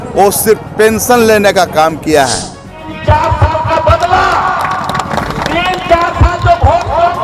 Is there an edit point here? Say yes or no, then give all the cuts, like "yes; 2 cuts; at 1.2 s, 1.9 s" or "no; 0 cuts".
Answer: yes; 1 cut; at 2.9 s